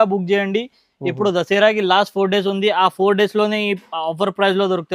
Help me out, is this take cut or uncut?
uncut